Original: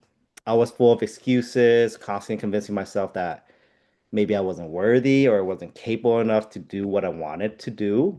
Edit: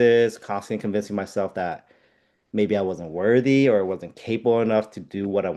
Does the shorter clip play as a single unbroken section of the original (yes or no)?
yes